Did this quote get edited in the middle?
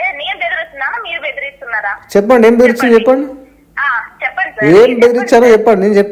no; 0 cuts

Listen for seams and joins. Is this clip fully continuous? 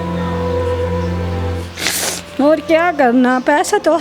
no; 1 cut; at 1.5 s

